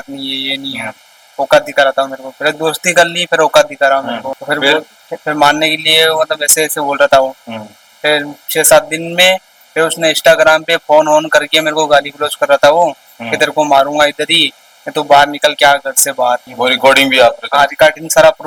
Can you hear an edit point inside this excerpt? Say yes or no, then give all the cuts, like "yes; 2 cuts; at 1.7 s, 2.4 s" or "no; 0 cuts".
no; 0 cuts